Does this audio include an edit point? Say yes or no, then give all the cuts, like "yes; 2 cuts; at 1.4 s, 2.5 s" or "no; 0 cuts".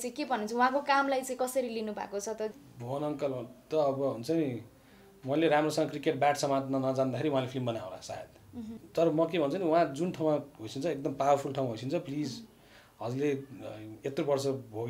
yes; 2 cuts; at 2.5 s, 8.8 s